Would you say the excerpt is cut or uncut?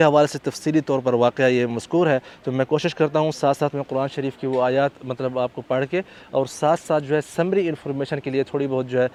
uncut